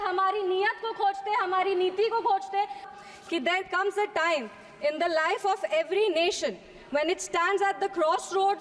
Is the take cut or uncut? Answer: cut